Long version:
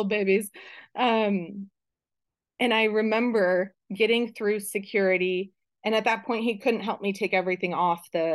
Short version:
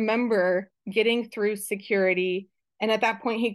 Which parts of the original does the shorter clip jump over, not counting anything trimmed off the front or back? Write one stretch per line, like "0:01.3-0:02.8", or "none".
none